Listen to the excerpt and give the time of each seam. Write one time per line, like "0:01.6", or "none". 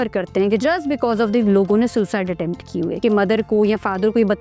0:03.0